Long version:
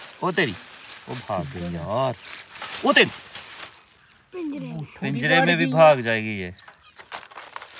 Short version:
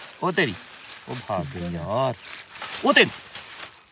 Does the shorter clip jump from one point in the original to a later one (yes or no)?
no